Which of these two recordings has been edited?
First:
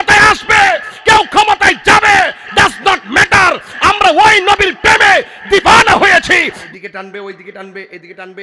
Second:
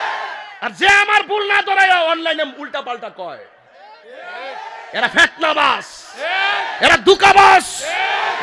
first; 1 cut; at 6.6 s

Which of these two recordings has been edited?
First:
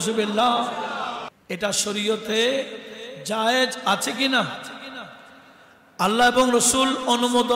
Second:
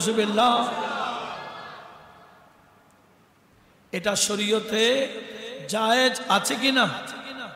first; 1 cut; at 1.3 s

